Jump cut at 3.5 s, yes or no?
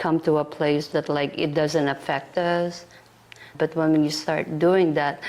yes